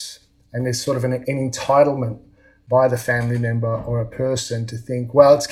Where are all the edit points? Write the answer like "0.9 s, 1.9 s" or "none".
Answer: 1.2 s